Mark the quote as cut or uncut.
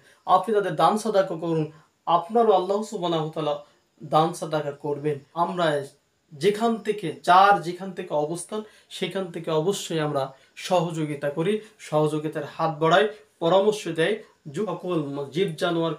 cut